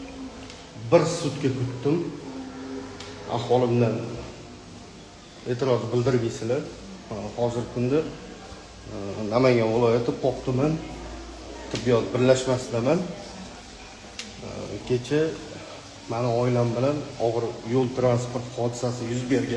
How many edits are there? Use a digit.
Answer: 0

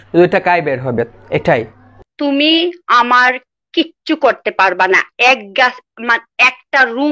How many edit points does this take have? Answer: 1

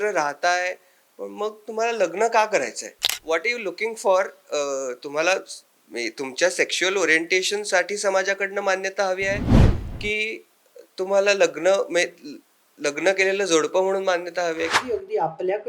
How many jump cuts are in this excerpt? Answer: 2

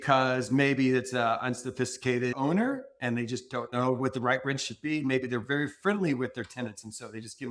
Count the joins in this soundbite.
1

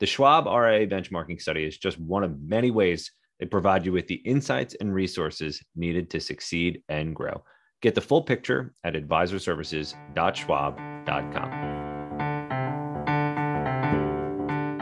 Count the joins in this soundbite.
1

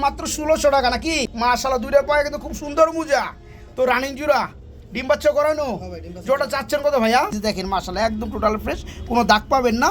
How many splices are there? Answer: 2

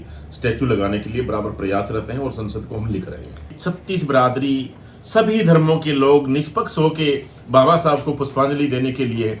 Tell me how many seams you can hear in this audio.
1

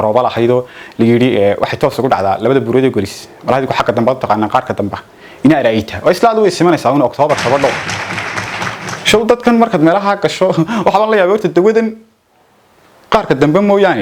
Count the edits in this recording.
0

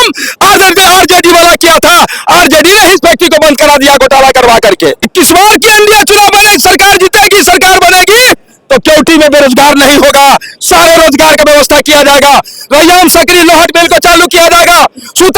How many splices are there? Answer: 1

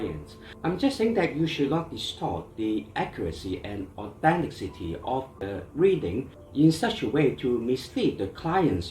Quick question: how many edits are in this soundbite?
1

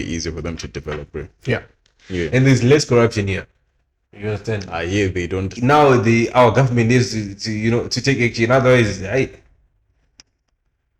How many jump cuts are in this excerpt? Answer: 1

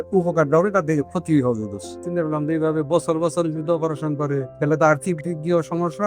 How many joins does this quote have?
2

